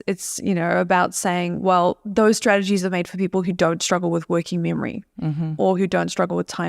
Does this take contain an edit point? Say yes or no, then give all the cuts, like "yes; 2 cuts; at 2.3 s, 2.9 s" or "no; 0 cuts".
yes; 1 cut; at 2.0 s